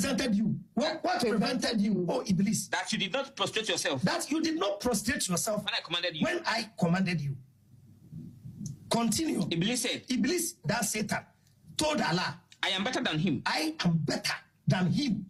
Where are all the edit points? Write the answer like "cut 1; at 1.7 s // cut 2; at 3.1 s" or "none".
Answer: none